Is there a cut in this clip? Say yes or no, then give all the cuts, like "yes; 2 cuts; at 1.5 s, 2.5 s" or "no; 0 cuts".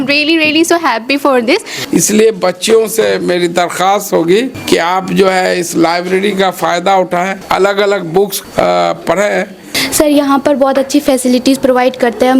yes; 5 cuts; at 1.7 s, 4.6 s, 7.4 s, 8.4 s, 9.7 s